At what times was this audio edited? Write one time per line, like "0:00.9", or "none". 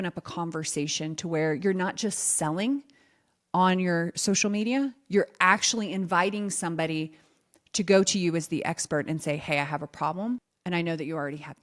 0:10.5